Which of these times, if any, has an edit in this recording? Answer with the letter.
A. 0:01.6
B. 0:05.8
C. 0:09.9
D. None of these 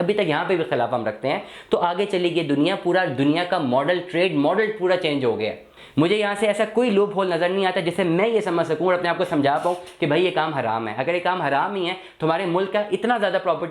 B